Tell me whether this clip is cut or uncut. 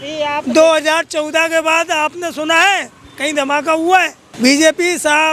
cut